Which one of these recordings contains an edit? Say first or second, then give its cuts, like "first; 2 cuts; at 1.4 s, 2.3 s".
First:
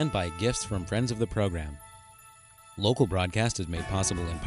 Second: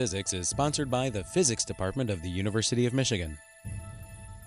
second; 1 cut; at 3.5 s